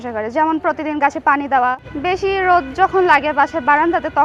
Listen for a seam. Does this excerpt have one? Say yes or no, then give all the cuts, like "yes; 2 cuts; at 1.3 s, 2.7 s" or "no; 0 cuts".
yes; 1 cut; at 1.8 s